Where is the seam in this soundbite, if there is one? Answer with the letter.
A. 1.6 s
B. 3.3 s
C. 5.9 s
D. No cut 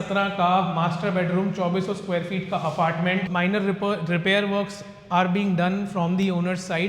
B